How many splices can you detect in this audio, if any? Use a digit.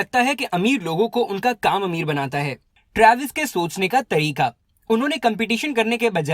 1